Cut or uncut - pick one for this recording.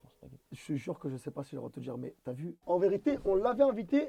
cut